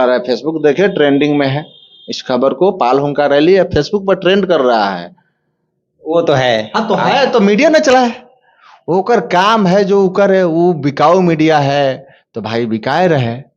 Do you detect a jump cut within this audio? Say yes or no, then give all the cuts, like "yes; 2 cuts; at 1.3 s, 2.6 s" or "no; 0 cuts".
no; 0 cuts